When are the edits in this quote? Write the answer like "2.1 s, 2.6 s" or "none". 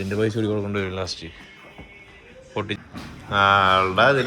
2.8 s